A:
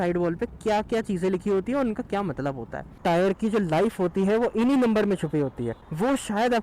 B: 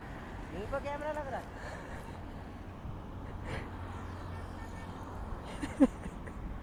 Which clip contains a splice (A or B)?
A